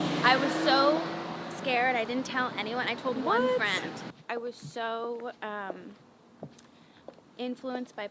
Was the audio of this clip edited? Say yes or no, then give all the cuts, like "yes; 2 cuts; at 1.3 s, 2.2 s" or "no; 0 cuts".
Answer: yes; 1 cut; at 4.1 s